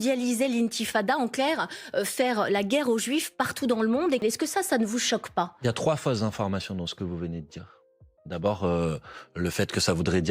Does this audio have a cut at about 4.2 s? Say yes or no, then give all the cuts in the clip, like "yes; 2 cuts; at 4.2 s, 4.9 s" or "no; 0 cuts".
yes; 1 cut; at 4.2 s